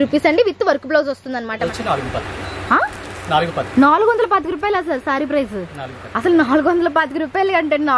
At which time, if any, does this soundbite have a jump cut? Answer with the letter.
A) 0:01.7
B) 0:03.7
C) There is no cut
A